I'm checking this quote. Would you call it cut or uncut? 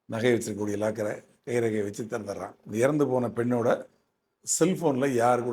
cut